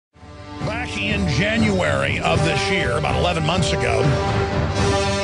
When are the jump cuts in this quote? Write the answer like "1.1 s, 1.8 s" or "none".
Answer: none